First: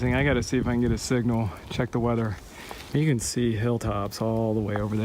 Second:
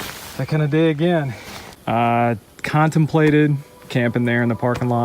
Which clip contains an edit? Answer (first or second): second